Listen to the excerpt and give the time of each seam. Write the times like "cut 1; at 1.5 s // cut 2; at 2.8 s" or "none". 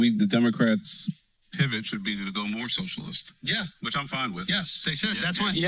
cut 1; at 2.8 s

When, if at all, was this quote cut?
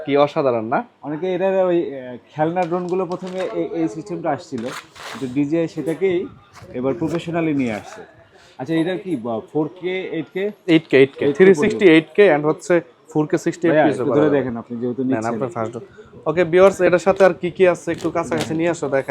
none

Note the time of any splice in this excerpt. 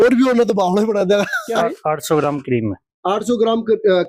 cut 1; at 1.4 s

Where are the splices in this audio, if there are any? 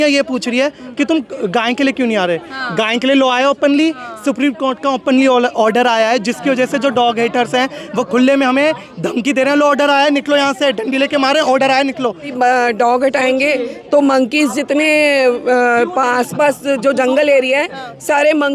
cut 1; at 12.3 s

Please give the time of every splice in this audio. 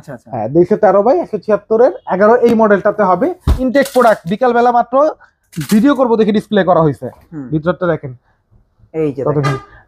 cut 1; at 3.5 s

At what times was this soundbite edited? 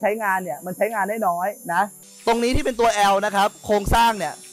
cut 1; at 2.0 s

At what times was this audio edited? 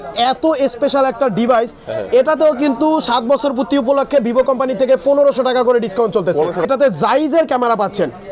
cut 1; at 6.7 s

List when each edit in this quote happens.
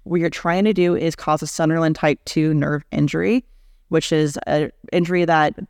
none

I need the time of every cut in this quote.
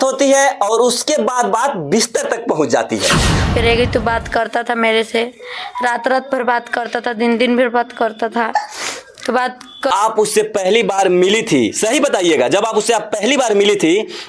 cut 1; at 3.5 s // cut 2; at 9.9 s

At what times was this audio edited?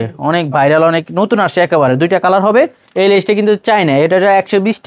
cut 1; at 2.8 s

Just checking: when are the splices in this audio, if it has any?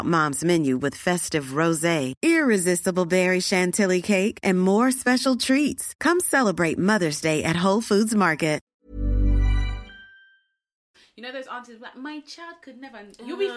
cut 1; at 8.8 s // cut 2; at 10.8 s

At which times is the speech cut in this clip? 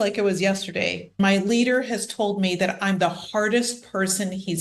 cut 1; at 1.2 s

